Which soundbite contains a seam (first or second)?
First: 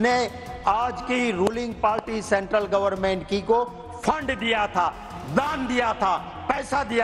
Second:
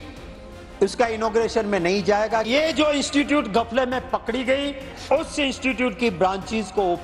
second